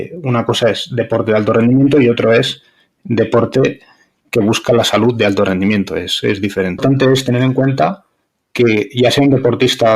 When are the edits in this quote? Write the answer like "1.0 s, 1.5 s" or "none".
6.8 s